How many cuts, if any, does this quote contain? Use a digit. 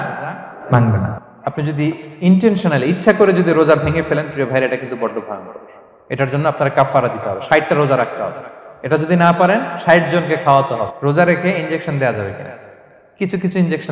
2